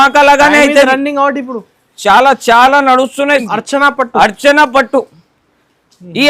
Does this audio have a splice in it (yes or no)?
yes